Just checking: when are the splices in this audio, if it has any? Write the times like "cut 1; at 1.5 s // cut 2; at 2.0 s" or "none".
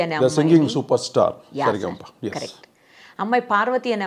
none